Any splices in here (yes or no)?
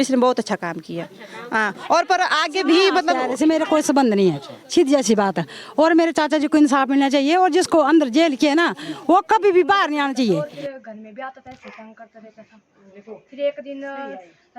yes